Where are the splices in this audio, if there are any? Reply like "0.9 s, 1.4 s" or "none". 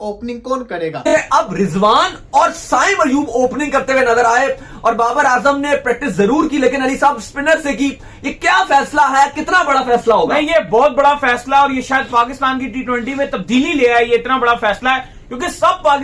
1.0 s

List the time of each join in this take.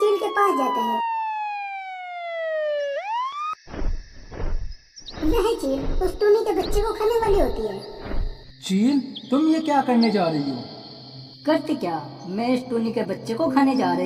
none

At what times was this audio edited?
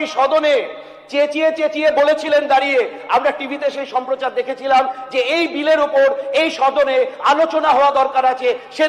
none

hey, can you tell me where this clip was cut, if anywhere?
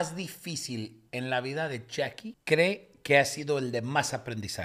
1.0 s, 2.3 s

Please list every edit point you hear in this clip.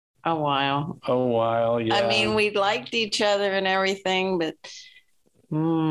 none

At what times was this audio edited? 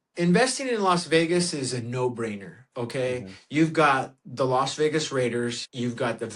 none

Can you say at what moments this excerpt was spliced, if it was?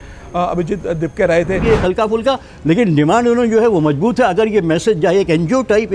1.6 s

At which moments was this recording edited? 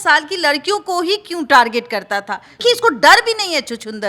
2.5 s

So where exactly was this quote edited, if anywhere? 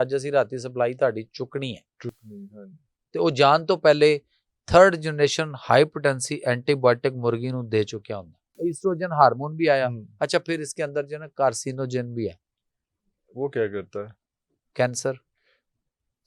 8.5 s

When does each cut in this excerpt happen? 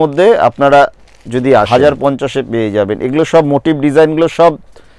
1.7 s

